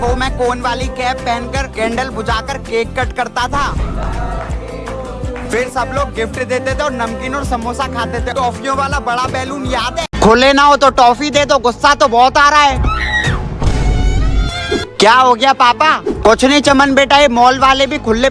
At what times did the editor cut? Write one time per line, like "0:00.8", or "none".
0:10.0